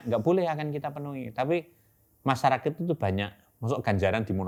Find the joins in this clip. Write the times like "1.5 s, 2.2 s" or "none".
none